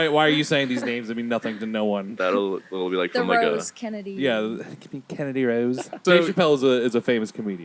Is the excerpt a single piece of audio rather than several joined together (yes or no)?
no